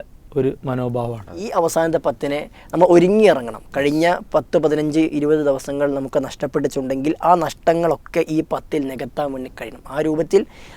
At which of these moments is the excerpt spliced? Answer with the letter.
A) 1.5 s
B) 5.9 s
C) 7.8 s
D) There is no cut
A